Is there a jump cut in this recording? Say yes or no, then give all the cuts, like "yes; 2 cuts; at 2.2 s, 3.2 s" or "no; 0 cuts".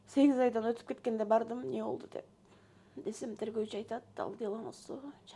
no; 0 cuts